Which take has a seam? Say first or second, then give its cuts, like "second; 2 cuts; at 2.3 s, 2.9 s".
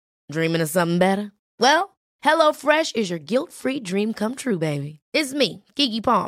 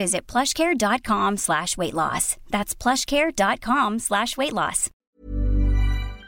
second; 1 cut; at 4.9 s